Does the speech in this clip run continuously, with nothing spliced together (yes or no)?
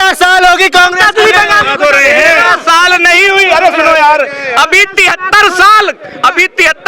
yes